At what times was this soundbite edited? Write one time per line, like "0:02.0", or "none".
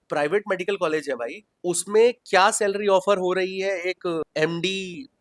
0:01.4
0:04.2